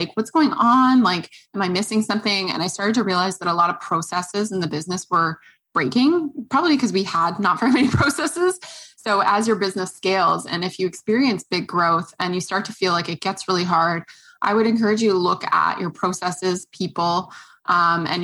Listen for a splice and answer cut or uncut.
uncut